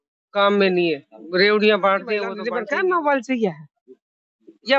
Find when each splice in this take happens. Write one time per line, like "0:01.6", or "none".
0:02.4